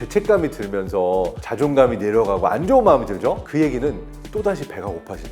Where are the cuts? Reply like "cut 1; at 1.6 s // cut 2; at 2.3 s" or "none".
cut 1; at 1.4 s // cut 2; at 3.4 s // cut 3; at 4.1 s